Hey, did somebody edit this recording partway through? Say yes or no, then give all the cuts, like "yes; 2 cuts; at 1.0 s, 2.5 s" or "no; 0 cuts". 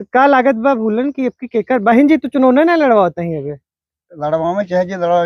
no; 0 cuts